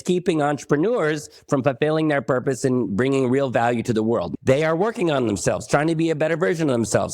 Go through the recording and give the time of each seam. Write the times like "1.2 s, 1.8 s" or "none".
4.3 s